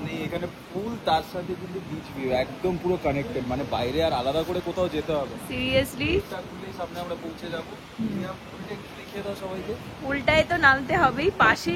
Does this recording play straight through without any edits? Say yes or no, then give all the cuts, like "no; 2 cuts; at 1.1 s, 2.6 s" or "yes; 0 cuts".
yes; 0 cuts